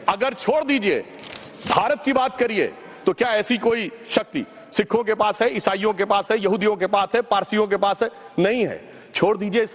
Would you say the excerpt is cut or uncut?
cut